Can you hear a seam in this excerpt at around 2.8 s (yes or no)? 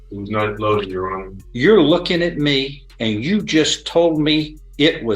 yes